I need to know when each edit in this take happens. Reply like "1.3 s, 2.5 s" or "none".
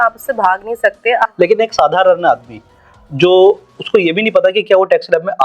1.3 s